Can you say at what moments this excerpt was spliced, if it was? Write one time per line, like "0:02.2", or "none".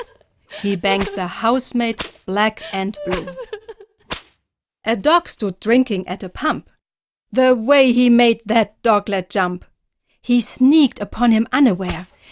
0:09.2